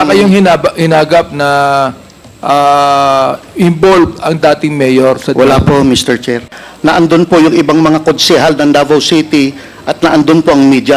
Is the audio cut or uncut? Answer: cut